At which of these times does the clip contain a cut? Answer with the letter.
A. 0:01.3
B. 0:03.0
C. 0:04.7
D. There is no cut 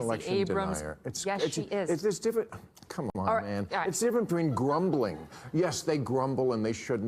B